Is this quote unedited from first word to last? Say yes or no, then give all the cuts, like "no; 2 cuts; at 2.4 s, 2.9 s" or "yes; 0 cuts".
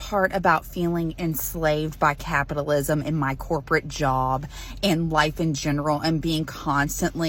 yes; 0 cuts